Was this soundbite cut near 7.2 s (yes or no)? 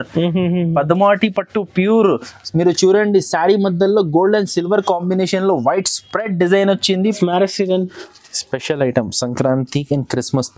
yes